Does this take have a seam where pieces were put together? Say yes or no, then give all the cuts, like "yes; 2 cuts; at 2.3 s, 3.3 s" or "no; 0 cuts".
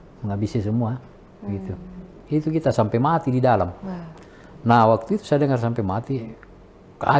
yes; 1 cut; at 2.1 s